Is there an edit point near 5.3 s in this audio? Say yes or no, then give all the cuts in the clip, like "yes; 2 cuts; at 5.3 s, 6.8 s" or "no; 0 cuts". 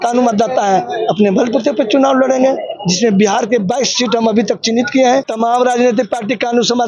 yes; 1 cut; at 5.3 s